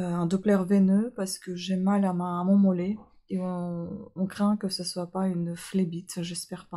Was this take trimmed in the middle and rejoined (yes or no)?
no